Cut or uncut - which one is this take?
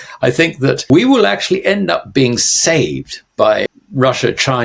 cut